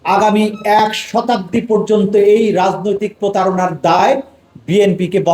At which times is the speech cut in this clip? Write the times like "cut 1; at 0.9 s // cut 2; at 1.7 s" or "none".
none